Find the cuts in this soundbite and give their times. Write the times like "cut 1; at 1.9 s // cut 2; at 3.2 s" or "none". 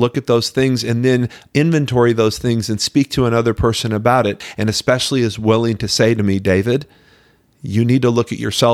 cut 1; at 4.4 s